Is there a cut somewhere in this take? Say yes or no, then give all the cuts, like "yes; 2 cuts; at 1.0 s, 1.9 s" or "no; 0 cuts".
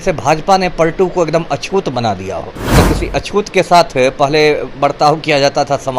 yes; 1 cut; at 2.7 s